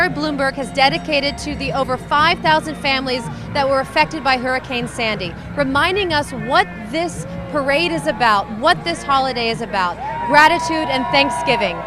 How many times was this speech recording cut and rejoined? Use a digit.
0